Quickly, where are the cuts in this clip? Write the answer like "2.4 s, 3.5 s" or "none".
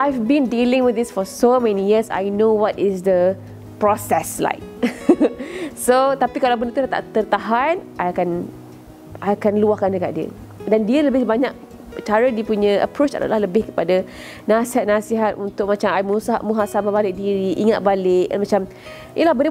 none